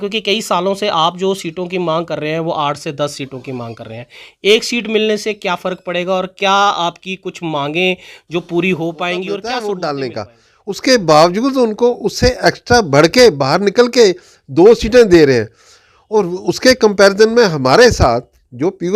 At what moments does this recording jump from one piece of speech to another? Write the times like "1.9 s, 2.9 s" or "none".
9.4 s